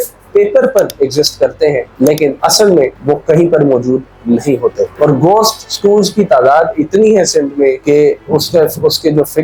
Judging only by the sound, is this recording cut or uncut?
uncut